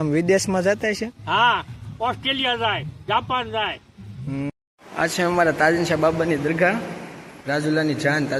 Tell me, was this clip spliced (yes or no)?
yes